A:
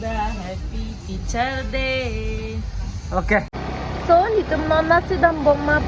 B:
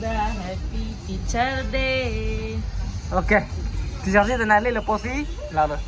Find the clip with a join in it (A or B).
A